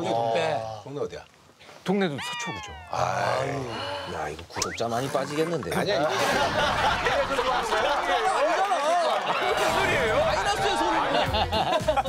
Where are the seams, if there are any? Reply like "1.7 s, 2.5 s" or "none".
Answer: 11.1 s